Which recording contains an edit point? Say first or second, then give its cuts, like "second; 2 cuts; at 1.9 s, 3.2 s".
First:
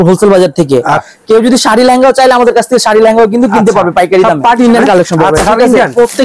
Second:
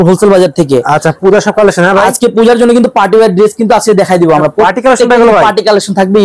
first; 2 cuts; at 1.1 s, 4.6 s